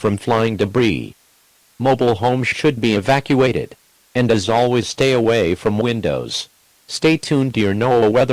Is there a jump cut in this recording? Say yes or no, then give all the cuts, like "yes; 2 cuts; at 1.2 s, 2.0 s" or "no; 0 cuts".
yes; 1 cut; at 1.4 s